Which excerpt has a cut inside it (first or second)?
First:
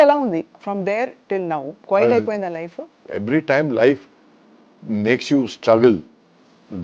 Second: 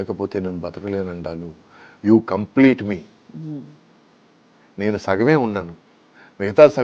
first